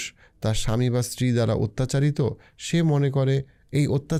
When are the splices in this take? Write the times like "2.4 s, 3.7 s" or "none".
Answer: none